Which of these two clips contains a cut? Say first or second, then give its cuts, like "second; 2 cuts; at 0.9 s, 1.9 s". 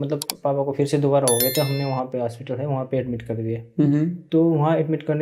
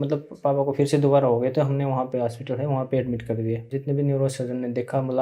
second; 1 cut; at 3.7 s